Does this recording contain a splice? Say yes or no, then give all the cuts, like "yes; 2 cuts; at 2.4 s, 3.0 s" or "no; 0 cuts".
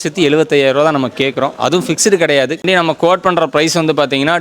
yes; 1 cut; at 2.6 s